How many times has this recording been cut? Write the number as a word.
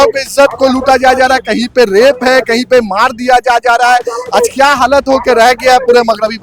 zero